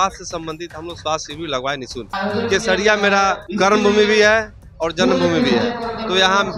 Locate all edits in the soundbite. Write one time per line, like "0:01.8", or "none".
0:02.1
0:03.4

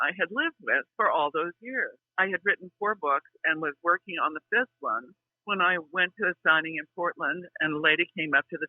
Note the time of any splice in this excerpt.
0:02.0

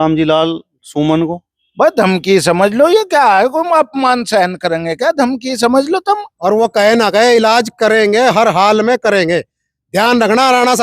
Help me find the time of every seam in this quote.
0:06.3

